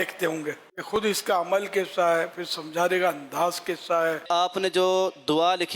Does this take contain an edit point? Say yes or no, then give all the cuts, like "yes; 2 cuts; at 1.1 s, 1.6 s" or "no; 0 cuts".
yes; 2 cuts; at 1.0 s, 4.3 s